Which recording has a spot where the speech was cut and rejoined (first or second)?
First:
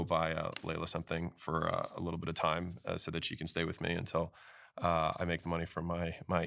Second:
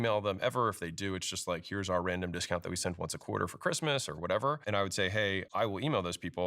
second